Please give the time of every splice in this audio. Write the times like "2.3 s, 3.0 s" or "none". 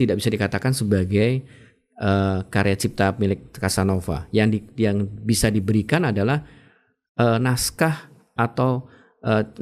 none

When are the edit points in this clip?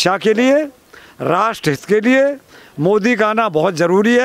none

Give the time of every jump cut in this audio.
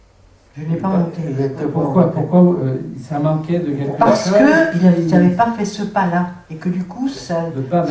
2.9 s

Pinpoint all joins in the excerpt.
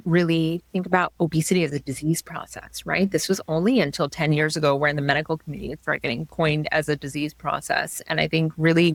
none

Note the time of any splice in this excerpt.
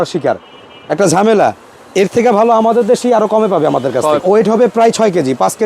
4.2 s

